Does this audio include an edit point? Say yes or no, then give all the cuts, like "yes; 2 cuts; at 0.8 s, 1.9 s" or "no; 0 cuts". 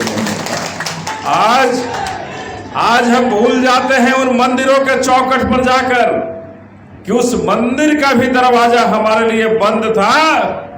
yes; 1 cut; at 1.1 s